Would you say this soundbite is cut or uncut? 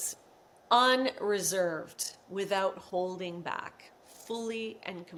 uncut